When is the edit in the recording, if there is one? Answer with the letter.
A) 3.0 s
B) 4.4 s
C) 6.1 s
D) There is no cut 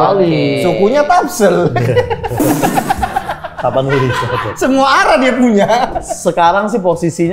C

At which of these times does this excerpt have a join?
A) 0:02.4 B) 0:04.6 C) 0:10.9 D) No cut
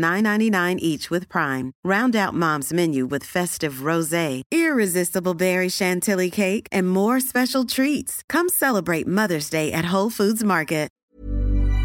C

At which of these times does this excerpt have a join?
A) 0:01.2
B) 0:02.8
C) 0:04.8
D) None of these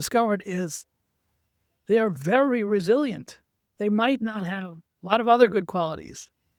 D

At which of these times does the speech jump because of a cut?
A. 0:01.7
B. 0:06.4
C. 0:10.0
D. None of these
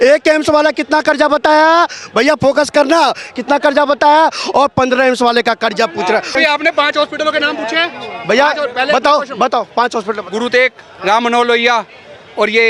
B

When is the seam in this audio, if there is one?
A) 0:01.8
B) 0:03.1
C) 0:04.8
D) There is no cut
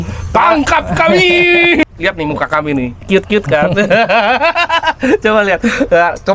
A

